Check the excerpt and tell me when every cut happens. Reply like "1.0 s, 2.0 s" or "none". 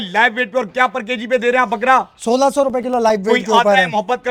none

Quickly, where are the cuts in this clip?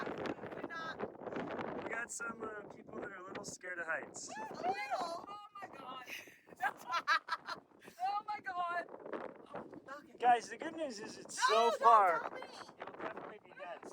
none

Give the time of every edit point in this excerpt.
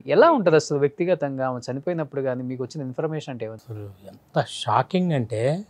3.6 s

